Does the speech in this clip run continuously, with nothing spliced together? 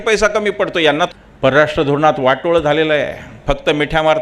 no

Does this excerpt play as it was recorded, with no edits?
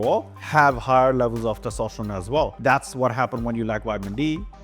no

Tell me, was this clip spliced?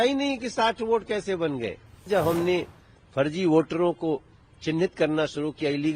yes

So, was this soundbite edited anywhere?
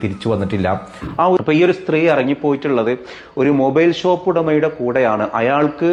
no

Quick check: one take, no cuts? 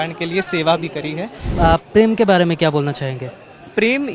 no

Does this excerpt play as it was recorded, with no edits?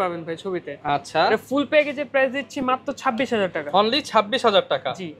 yes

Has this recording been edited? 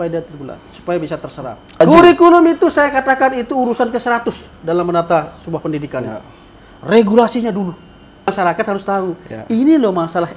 yes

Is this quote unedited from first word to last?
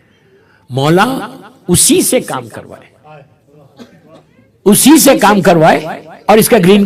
yes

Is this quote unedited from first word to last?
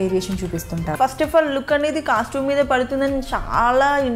no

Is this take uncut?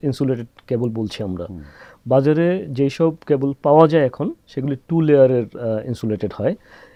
yes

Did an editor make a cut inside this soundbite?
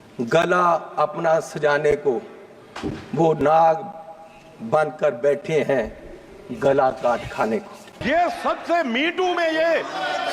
yes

